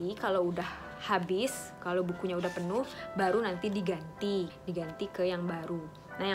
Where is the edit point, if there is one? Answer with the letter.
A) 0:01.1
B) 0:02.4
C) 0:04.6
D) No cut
C